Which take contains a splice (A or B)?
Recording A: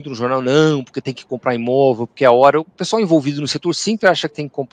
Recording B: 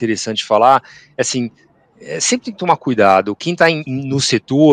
B